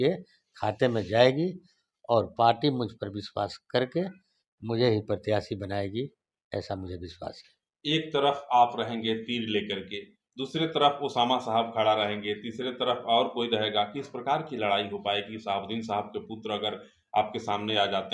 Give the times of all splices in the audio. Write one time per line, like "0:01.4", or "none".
none